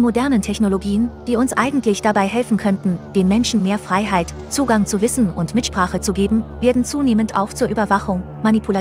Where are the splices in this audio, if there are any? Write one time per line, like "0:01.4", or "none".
none